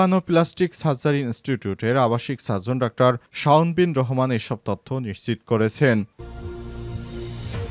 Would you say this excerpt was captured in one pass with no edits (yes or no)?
no